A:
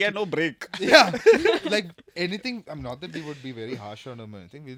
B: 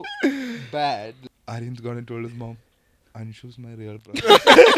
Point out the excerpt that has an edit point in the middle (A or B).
B